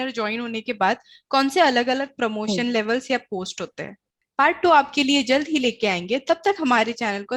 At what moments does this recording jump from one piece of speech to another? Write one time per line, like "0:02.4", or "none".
none